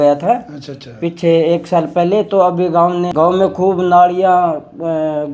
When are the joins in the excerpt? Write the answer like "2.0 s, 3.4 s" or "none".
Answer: 3.1 s